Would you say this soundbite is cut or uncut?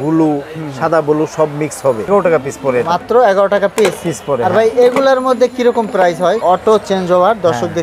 cut